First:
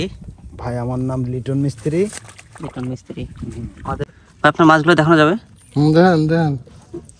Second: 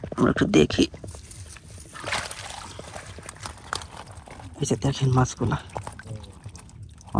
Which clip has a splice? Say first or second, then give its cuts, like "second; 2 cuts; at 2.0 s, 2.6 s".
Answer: first; 1 cut; at 4.0 s